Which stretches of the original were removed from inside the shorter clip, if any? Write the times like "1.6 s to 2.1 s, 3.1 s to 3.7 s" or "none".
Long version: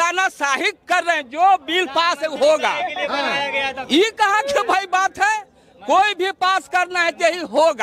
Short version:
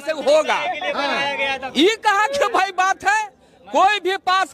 none